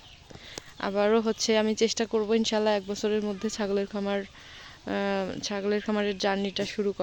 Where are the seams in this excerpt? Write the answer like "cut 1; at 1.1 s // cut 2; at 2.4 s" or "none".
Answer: none